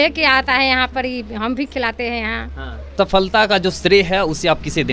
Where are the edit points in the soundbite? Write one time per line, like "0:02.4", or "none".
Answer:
0:02.9